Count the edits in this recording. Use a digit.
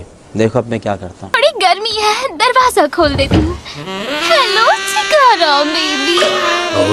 1